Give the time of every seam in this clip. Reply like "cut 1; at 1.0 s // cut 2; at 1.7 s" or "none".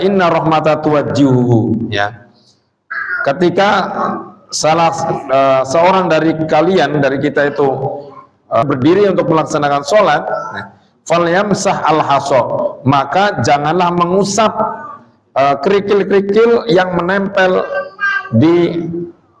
cut 1; at 8.6 s